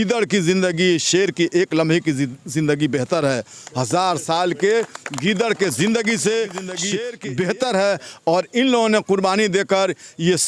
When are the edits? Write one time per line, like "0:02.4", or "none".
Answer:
0:06.9